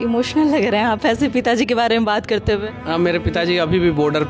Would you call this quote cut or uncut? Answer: uncut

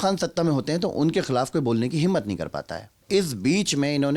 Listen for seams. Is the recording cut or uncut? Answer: cut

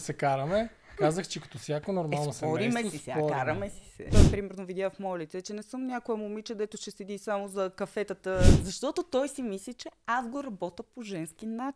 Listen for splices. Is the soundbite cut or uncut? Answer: cut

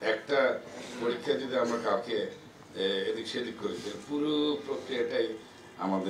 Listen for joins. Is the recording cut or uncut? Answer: uncut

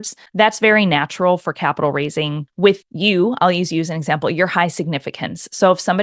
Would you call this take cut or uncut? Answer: uncut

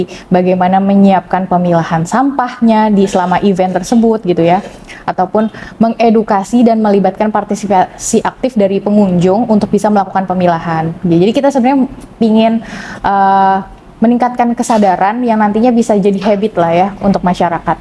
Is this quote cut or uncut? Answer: uncut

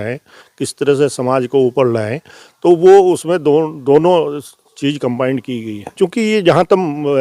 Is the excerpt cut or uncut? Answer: cut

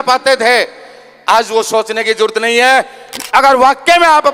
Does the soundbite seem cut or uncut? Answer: cut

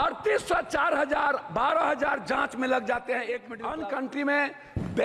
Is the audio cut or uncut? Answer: cut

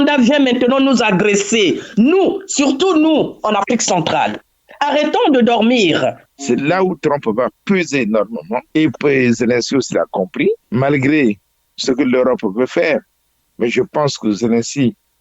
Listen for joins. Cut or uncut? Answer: cut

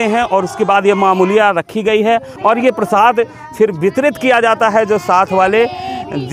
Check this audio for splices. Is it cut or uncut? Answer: cut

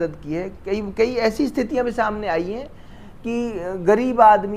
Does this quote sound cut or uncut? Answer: uncut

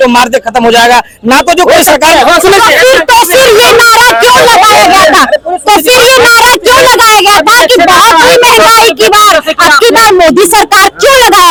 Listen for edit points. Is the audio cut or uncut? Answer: uncut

